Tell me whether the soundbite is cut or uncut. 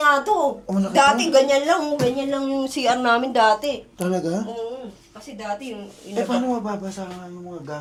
uncut